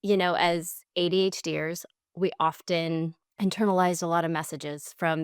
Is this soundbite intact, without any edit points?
no; 1 cut; at 3.2 s

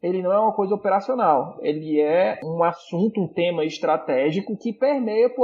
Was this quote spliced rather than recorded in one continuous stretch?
no; 0 cuts

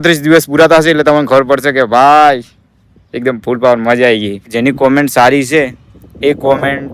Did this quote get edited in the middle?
yes; 1 cut; at 4.5 s

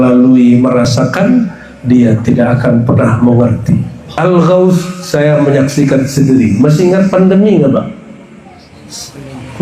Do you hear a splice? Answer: yes; 1 cut; at 4.0 s

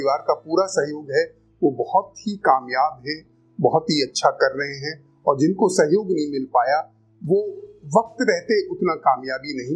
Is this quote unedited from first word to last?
yes; 0 cuts

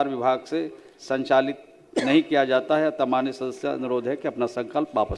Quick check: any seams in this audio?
no; 0 cuts

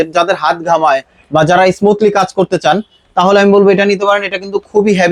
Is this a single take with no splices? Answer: yes; 0 cuts

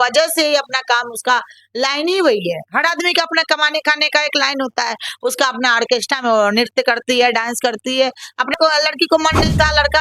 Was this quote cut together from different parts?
yes; 1 cut; at 8.5 s

